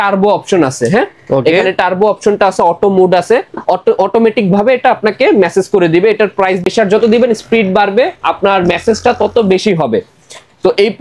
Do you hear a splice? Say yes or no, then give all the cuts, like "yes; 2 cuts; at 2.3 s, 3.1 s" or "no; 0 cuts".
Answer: yes; 1 cut; at 6.6 s